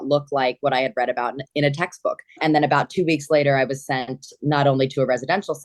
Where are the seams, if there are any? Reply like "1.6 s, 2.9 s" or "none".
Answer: 2.3 s